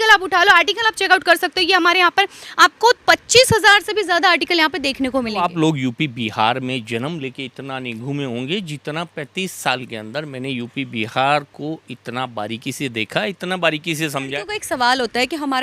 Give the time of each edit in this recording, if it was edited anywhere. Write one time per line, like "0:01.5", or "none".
0:05.5
0:14.3

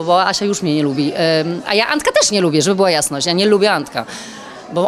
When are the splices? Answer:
none

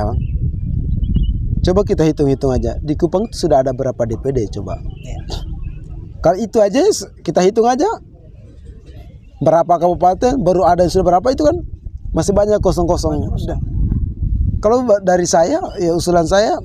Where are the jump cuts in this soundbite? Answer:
none

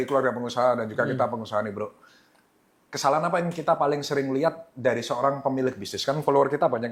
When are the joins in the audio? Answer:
none

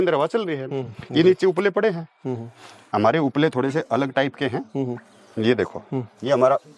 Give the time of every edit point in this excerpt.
none

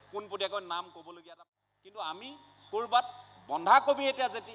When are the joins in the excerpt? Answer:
0:01.2

